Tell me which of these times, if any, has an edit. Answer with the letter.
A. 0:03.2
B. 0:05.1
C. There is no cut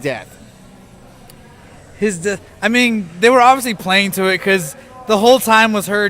B